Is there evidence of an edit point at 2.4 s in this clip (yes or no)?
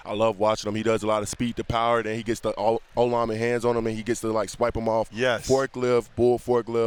no